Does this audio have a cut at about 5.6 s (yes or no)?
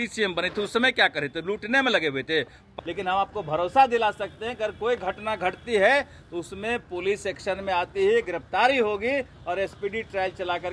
no